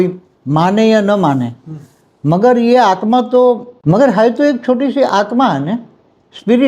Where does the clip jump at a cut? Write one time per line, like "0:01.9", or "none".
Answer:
0:03.7